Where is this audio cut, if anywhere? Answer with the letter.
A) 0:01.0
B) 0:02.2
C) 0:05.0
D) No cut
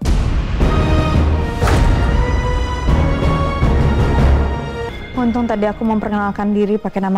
C